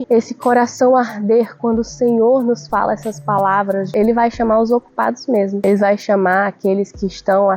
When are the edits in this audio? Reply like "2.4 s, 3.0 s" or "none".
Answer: 3.9 s